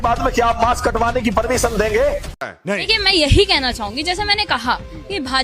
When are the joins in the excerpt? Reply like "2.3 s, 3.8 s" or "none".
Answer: 2.9 s